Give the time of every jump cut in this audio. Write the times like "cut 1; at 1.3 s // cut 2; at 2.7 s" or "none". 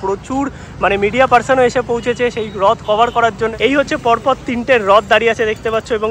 cut 1; at 3.5 s